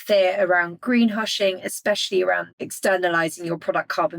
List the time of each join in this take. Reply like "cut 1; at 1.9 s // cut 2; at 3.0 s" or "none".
cut 1; at 2.5 s

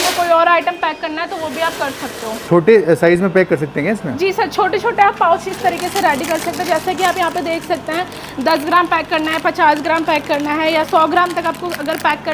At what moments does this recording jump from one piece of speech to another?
cut 1; at 2.4 s

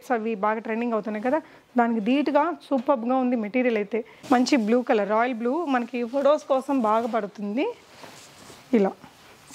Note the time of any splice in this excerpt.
cut 1; at 4.1 s

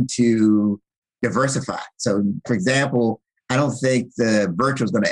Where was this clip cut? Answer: cut 1; at 2.5 s

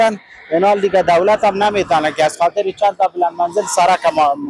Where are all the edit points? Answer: none

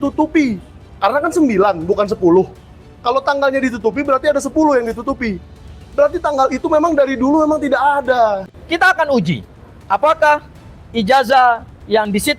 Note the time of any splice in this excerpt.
cut 1; at 8.6 s

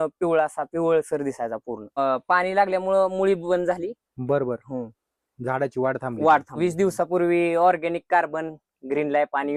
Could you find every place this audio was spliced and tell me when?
cut 1; at 1.9 s // cut 2; at 6.5 s

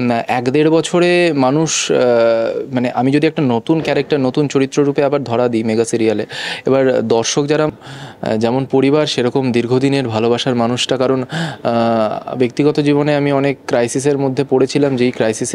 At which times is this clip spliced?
cut 1; at 7.8 s

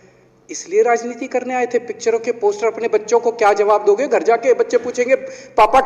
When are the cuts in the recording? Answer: none

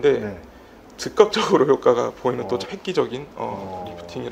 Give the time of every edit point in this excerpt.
cut 1; at 2.7 s

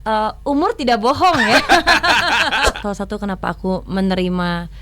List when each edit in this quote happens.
cut 1; at 2.8 s

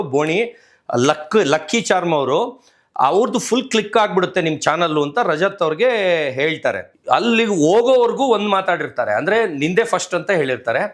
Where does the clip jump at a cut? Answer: cut 1; at 6.9 s

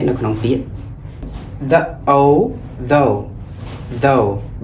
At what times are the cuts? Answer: cut 1; at 1.3 s

